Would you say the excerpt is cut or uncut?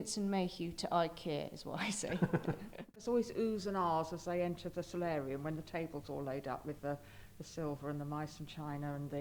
cut